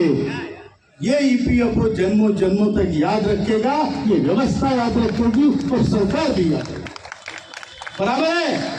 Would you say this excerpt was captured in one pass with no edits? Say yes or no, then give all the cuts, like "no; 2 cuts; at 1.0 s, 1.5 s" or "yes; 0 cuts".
yes; 0 cuts